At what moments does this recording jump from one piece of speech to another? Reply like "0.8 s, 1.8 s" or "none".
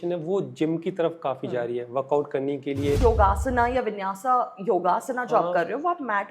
3.0 s